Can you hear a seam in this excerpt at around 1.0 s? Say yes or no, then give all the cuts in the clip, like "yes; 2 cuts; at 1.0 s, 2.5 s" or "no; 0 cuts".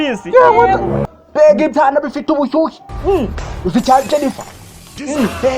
yes; 1 cut; at 1.0 s